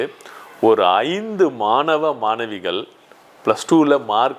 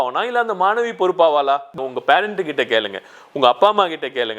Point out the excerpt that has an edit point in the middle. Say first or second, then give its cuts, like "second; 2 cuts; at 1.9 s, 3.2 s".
second; 1 cut; at 1.7 s